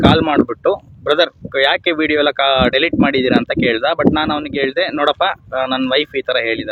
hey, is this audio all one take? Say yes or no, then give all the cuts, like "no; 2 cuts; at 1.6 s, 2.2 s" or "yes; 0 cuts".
yes; 0 cuts